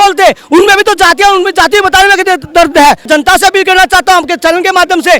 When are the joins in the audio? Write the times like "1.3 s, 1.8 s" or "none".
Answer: 3.1 s